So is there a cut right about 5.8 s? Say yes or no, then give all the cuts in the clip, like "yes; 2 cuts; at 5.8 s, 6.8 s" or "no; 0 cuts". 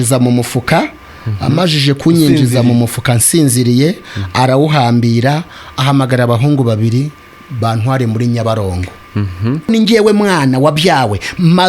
no; 1 cut; at 9.7 s